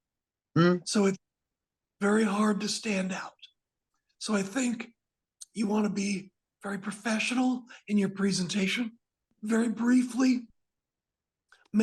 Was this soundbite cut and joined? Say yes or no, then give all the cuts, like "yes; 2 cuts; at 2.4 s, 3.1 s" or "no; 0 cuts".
yes; 1 cut; at 9.3 s